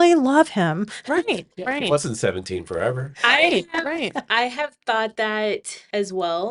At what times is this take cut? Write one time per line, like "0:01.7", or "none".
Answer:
0:05.4